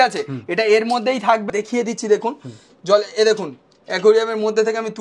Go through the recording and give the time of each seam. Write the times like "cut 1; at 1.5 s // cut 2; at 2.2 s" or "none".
cut 1; at 1.5 s